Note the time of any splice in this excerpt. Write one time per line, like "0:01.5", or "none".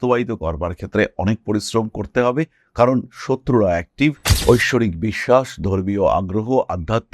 0:04.3